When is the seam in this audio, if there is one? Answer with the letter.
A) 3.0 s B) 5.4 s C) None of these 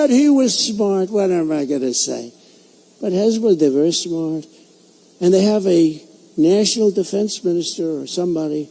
B